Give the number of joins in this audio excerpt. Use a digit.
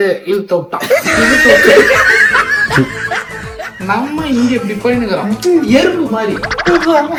0